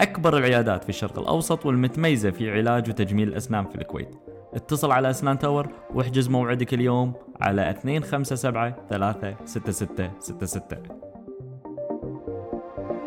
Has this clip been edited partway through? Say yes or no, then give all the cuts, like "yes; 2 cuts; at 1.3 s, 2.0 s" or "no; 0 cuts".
yes; 1 cut; at 10.8 s